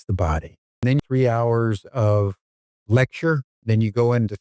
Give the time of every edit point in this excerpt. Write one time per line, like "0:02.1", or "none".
0:01.0
0:03.5